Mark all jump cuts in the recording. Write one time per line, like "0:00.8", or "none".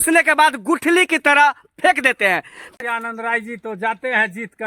0:02.8